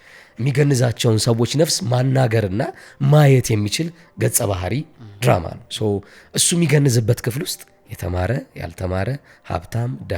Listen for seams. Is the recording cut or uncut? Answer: uncut